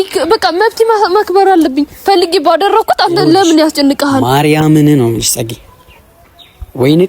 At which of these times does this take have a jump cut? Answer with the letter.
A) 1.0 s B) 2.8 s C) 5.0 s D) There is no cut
D